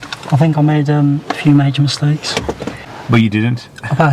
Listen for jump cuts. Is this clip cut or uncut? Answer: cut